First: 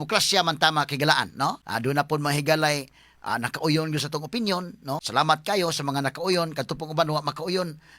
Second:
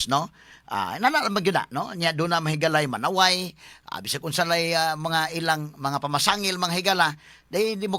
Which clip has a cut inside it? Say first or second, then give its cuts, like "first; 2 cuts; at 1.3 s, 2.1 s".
first; 2 cuts; at 1.7 s, 5.0 s